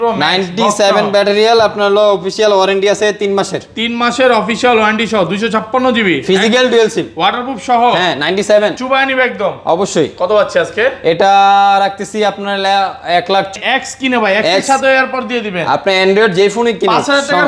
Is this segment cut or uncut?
cut